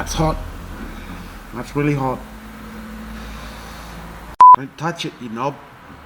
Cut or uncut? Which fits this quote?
cut